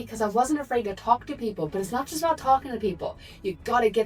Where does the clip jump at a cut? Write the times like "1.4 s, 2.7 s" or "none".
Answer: none